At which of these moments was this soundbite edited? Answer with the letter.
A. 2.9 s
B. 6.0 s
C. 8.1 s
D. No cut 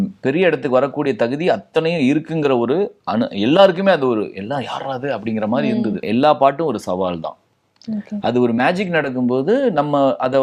B